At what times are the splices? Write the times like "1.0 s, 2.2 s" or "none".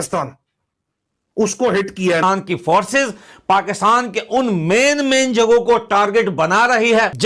2.2 s